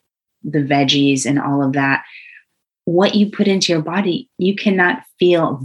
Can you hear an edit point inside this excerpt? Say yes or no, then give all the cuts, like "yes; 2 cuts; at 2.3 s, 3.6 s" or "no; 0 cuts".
yes; 1 cut; at 4.3 s